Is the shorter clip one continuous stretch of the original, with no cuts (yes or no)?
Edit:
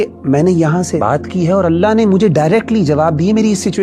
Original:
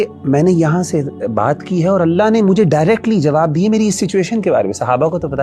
no